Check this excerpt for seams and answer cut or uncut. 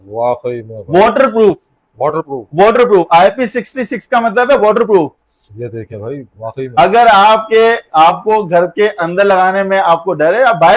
uncut